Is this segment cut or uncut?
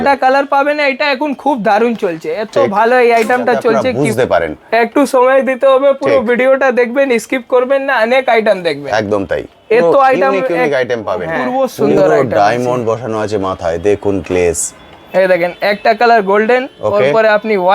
cut